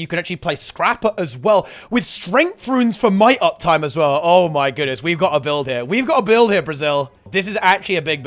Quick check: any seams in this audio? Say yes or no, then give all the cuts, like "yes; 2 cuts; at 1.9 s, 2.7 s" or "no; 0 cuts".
yes; 1 cut; at 7.3 s